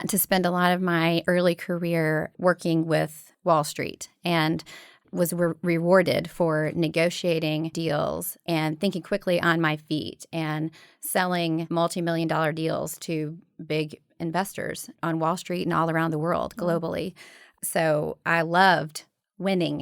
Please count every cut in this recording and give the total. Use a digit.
3